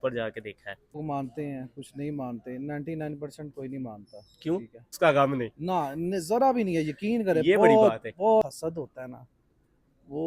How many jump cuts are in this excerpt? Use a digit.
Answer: 3